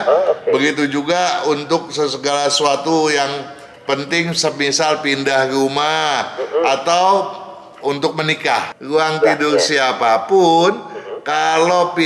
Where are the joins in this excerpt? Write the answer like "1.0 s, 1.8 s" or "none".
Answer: 8.7 s

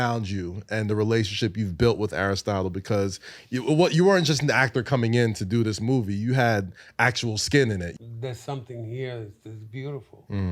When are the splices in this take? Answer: 7.9 s

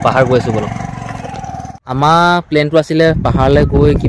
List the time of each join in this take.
1.8 s

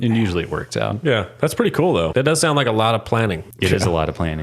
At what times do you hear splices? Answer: 2.1 s, 3.5 s

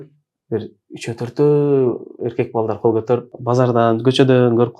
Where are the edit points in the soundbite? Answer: 3.3 s

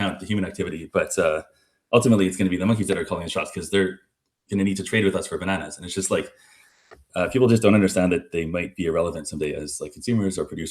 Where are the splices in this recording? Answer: 8.3 s

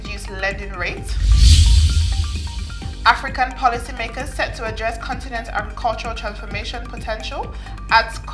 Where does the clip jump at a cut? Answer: 2.4 s

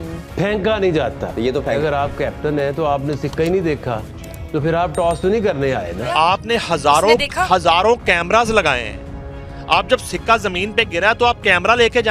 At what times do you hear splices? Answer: 1.8 s, 6.1 s

